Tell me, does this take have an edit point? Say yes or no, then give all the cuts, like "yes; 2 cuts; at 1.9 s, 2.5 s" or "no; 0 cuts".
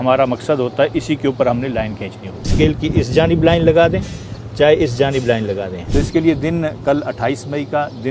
yes; 2 cuts; at 2.5 s, 5.8 s